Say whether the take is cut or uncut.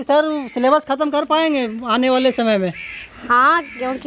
uncut